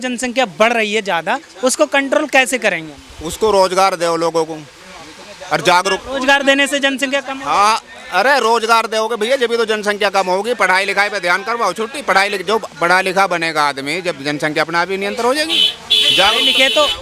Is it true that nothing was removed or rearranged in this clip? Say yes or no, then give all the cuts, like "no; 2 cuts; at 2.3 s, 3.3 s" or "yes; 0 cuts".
yes; 0 cuts